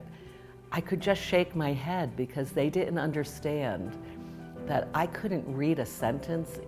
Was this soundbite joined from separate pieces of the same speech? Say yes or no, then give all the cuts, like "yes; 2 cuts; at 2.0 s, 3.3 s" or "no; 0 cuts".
no; 0 cuts